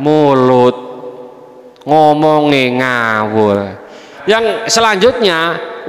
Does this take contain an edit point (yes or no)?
yes